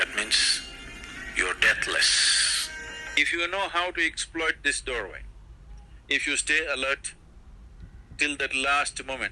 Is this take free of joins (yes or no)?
no